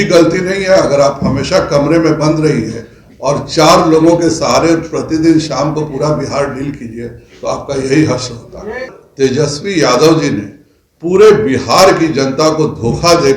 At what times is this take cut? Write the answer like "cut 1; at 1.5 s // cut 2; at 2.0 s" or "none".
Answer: cut 1; at 9.0 s